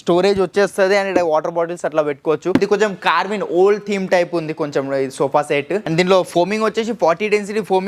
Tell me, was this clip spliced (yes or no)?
yes